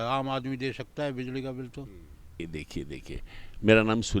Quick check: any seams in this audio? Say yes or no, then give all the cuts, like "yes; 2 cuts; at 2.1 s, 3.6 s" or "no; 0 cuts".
yes; 1 cut; at 2.4 s